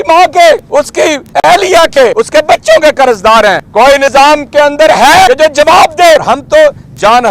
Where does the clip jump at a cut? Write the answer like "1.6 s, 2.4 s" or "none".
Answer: 1.0 s, 2.2 s, 3.9 s, 5.3 s, 6.2 s